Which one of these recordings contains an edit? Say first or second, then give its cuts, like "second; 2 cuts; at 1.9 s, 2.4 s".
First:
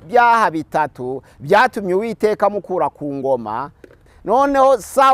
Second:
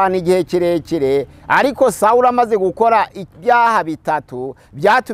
first; 1 cut; at 4.1 s